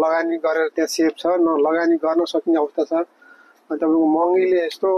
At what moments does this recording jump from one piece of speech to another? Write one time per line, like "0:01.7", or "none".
none